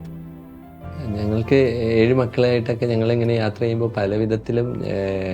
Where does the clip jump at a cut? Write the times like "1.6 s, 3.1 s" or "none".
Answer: 1.0 s